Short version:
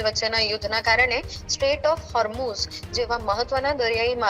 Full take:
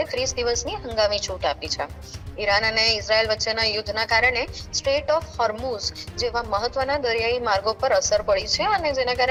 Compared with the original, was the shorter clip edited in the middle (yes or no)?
no